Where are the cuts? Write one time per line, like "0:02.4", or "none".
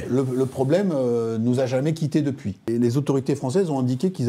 0:02.7